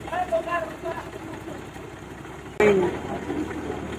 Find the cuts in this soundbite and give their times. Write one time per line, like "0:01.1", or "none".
0:02.6